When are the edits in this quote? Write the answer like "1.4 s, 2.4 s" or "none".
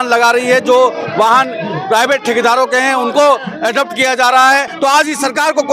4.7 s